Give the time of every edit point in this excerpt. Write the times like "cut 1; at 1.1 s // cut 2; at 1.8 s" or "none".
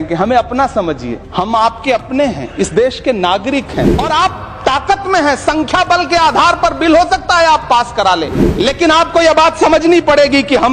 cut 1; at 1.2 s // cut 2; at 3.9 s // cut 3; at 8.4 s